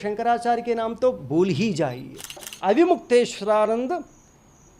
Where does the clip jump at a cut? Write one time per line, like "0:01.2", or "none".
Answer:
0:02.5